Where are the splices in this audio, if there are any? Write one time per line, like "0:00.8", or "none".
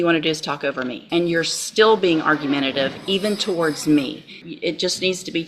0:01.0
0:04.4